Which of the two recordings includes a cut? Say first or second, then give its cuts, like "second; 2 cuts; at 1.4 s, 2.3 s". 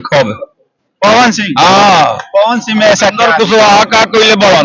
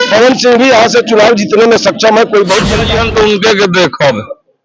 second; 1 cut; at 2.8 s